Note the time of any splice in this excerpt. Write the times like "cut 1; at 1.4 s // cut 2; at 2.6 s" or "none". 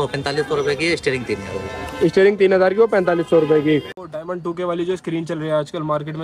cut 1; at 4.0 s